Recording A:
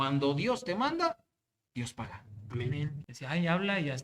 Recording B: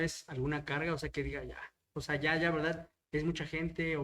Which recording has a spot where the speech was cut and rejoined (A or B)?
A